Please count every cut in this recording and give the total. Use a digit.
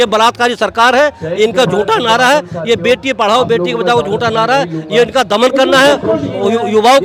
0